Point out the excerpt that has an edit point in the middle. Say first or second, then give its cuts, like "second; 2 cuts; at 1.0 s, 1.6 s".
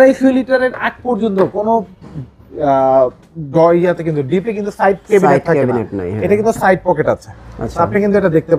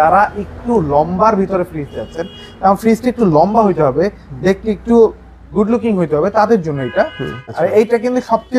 second; 1 cut; at 7.4 s